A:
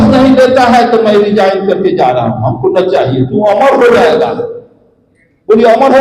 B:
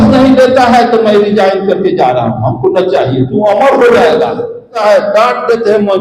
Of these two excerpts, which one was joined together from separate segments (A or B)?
B